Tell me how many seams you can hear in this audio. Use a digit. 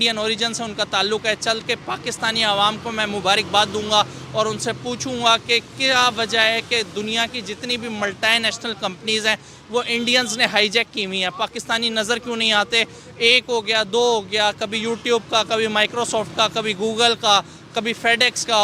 0